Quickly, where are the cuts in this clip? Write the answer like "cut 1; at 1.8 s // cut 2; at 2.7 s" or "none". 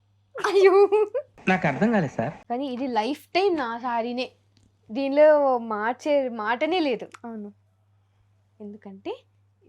cut 1; at 2.4 s

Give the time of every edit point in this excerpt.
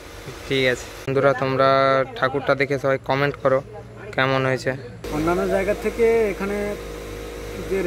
cut 1; at 1.1 s // cut 2; at 5.0 s

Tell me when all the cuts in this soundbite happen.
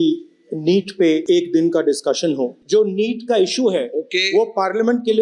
cut 1; at 1.2 s // cut 2; at 2.6 s

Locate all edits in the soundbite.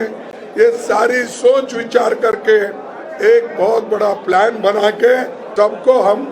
cut 1; at 5.4 s

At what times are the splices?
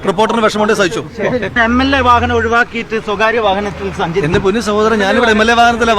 cut 1; at 1.6 s

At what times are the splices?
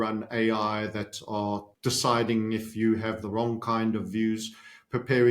cut 1; at 1.7 s

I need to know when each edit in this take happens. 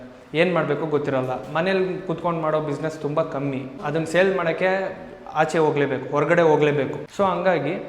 cut 1; at 3.8 s // cut 2; at 7.0 s

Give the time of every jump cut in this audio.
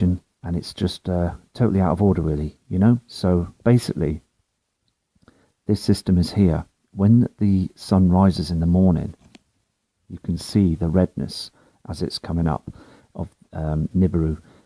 cut 1; at 9.1 s

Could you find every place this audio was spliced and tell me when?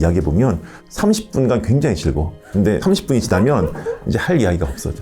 cut 1; at 2.7 s

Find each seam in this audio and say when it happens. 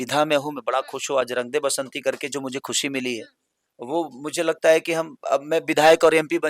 none

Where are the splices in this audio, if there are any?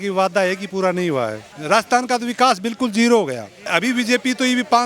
cut 1; at 1.5 s // cut 2; at 3.7 s

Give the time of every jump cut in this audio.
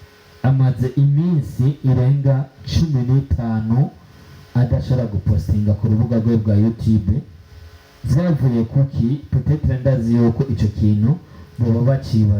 none

